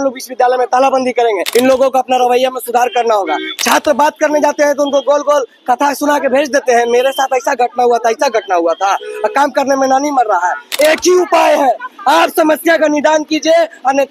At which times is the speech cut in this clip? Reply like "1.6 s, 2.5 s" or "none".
1.4 s, 10.6 s

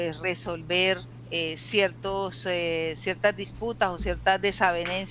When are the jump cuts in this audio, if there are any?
1.2 s

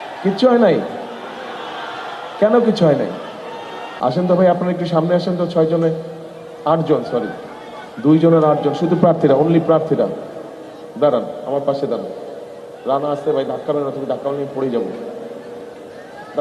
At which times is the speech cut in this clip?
3.8 s

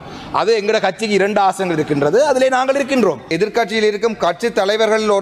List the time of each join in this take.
3.2 s

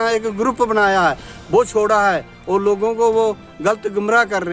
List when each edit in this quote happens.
none

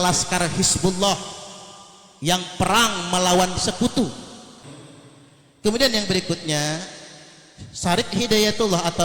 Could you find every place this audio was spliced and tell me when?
4.6 s

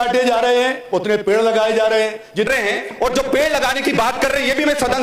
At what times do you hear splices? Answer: 2.5 s

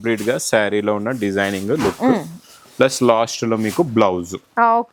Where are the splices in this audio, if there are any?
none

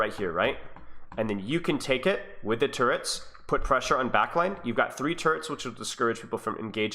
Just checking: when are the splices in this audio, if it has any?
none

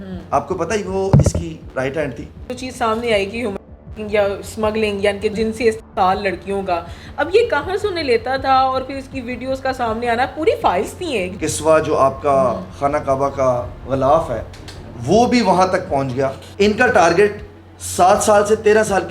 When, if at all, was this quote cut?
2.5 s, 5.3 s, 11.3 s, 16.4 s

